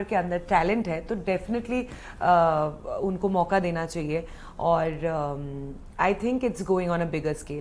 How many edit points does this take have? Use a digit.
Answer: 0